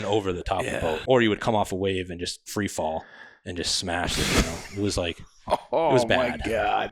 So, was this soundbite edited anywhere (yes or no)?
yes